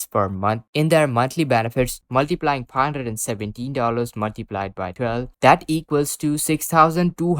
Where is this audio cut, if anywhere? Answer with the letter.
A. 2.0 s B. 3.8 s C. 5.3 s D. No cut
A